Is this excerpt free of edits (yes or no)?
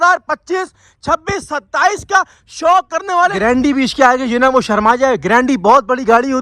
no